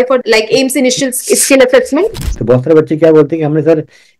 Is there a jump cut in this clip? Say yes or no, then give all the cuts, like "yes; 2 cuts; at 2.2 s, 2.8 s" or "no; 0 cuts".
yes; 1 cut; at 2.4 s